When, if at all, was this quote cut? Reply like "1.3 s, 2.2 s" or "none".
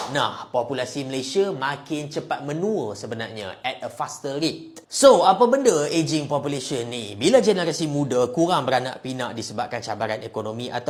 none